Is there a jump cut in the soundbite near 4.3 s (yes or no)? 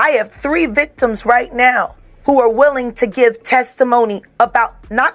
no